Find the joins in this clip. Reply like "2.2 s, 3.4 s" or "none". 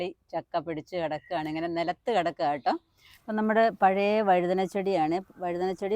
3.0 s